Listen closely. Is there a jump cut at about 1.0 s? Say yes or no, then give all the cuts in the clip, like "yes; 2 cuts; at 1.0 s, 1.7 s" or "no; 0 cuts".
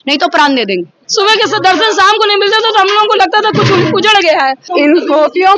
yes; 2 cuts; at 1.0 s, 4.6 s